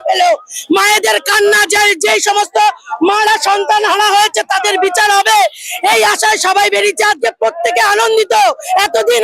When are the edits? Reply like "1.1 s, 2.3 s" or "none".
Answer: none